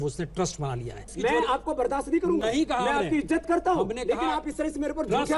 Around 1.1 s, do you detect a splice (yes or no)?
yes